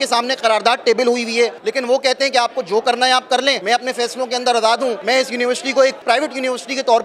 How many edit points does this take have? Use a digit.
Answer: 2